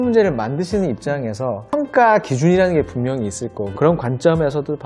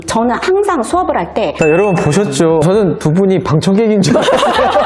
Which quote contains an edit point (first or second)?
second